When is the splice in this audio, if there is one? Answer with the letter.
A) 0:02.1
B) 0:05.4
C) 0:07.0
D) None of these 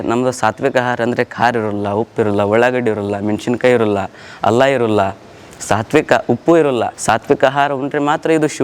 C